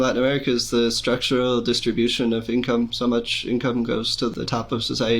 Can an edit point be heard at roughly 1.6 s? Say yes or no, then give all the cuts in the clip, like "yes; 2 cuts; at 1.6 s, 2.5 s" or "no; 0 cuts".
no; 1 cut; at 4.3 s